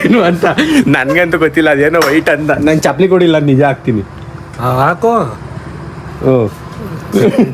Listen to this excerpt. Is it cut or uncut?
uncut